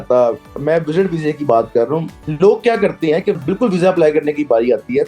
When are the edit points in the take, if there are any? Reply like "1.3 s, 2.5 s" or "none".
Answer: 2.2 s, 3.4 s